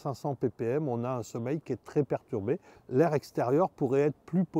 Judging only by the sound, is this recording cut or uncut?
cut